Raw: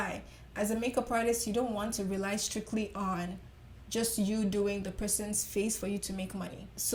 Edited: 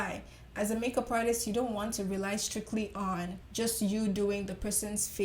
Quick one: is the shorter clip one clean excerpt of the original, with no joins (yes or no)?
no